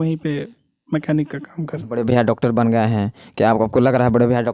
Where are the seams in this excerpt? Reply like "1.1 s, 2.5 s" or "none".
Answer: 1.6 s